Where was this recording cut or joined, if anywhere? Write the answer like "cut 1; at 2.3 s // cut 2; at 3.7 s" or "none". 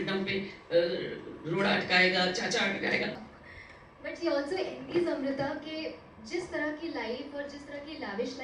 cut 1; at 3.3 s